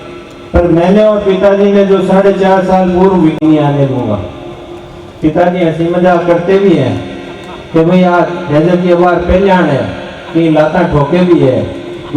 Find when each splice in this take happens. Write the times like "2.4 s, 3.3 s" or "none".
3.4 s